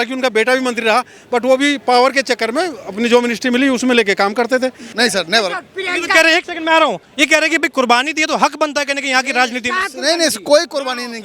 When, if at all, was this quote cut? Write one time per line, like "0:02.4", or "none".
0:04.9